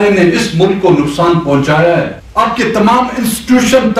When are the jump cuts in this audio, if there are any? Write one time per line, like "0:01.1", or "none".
0:02.2

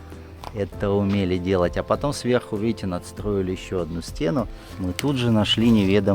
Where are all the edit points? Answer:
0:04.6

